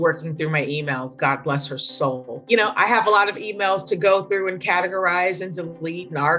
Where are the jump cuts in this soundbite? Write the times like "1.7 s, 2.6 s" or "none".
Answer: 2.3 s

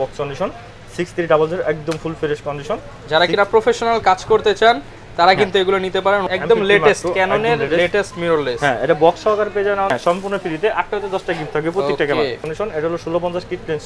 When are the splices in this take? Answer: 6.2 s, 9.9 s, 12.4 s

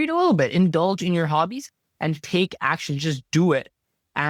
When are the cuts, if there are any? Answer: none

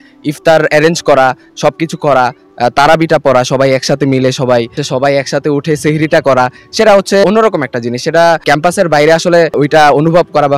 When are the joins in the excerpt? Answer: 4.8 s, 7.2 s, 8.4 s, 9.6 s

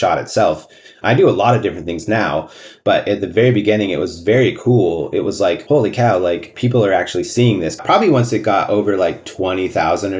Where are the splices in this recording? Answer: 5.6 s, 6.5 s, 7.8 s, 9.3 s

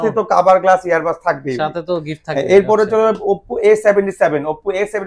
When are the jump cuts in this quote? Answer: none

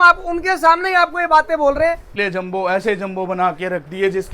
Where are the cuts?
2.1 s

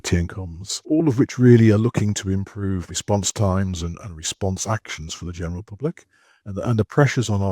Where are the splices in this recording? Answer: 6.5 s

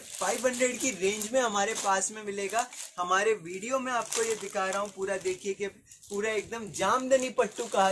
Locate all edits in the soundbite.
none

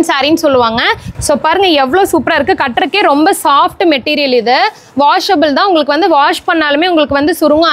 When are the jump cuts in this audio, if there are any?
1.1 s

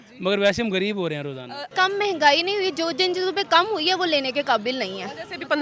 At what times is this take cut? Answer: 1.6 s

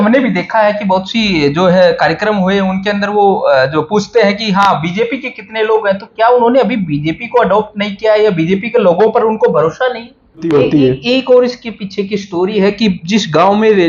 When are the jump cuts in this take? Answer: 10.4 s

